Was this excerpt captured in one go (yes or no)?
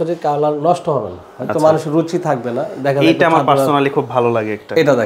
yes